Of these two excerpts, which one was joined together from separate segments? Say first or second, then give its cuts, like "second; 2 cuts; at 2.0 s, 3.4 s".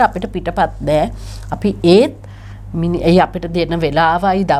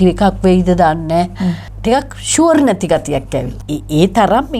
second; 2 cuts; at 1.7 s, 3.5 s